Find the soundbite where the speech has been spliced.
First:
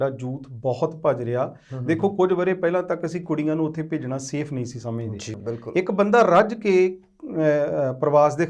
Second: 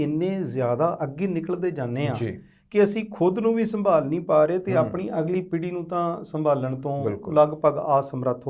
first; 1 cut; at 5.3 s

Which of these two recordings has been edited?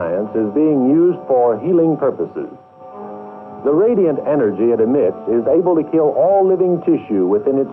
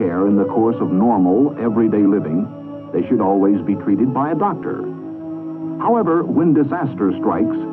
first; 1 cut; at 5.6 s

